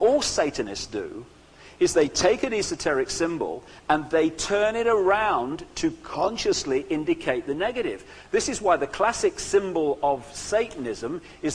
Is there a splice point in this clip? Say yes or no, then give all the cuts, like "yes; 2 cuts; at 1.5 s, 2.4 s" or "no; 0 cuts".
no; 0 cuts